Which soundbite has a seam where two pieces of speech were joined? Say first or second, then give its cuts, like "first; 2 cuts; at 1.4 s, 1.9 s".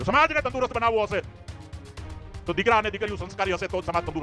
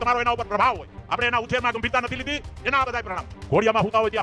second; 2 cuts; at 0.9 s, 3.3 s